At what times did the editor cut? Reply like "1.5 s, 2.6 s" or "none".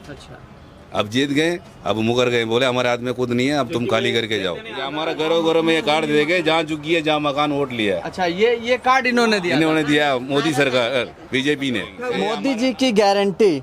4.8 s, 12.0 s